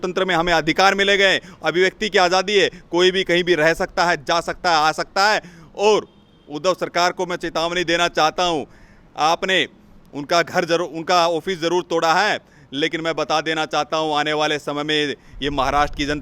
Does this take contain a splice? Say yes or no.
no